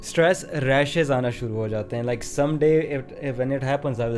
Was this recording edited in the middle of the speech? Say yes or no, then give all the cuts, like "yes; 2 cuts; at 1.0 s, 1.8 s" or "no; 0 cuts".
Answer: no; 0 cuts